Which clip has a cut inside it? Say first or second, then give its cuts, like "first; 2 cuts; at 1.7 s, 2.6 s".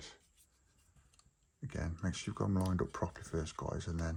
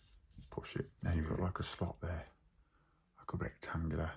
second; 1 cut; at 1.3 s